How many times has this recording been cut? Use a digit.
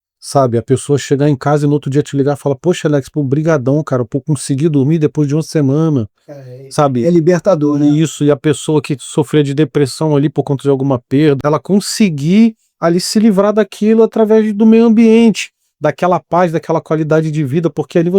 1